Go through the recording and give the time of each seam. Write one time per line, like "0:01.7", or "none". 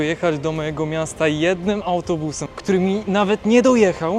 0:02.4